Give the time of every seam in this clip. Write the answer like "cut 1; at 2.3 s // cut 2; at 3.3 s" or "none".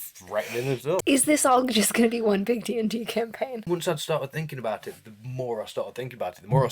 cut 1; at 1.0 s // cut 2; at 3.7 s